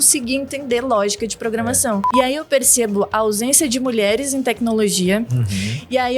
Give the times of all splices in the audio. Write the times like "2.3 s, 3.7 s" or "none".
2.1 s